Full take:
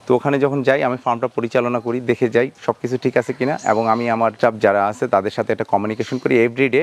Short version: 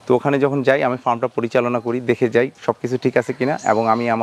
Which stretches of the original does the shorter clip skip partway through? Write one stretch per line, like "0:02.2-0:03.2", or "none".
none